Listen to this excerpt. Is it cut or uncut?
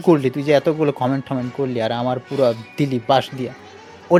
uncut